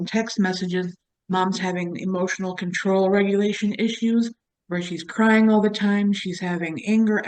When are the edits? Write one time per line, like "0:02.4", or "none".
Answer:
none